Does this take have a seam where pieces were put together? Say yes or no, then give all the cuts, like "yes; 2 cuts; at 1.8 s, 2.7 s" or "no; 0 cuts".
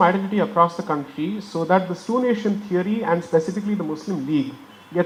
no; 0 cuts